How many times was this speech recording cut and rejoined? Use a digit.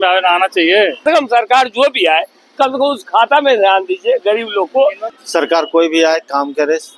2